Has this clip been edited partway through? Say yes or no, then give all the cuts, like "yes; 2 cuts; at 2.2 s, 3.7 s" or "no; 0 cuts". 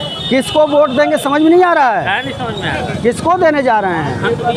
no; 0 cuts